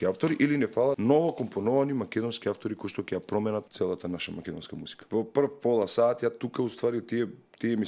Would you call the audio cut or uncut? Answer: cut